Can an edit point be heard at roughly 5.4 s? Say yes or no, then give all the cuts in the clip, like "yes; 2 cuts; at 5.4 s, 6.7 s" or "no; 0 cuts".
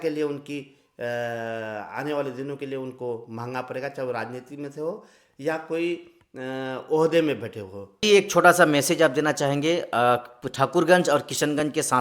no; 1 cut; at 8.0 s